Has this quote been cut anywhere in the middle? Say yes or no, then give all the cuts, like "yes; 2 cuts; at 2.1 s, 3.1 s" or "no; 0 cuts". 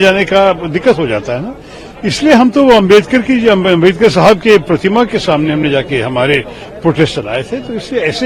no; 0 cuts